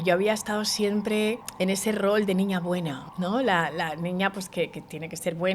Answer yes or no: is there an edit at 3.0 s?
yes